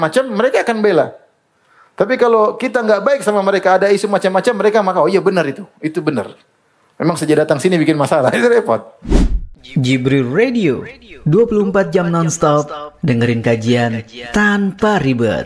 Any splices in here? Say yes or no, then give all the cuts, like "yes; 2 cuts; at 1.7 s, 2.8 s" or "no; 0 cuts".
yes; 1 cut; at 9.0 s